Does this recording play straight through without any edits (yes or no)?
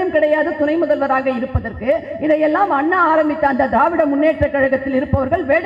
yes